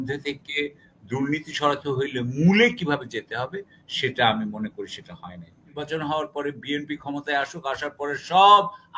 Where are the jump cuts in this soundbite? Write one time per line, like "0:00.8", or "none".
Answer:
0:05.8